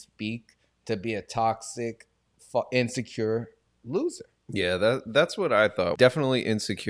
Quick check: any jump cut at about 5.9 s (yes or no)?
yes